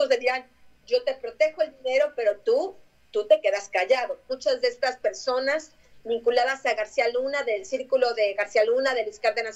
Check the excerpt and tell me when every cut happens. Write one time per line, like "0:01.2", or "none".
0:04.3